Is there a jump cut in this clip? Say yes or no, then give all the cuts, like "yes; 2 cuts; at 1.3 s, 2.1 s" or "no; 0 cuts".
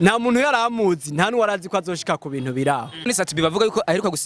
yes; 1 cut; at 3.0 s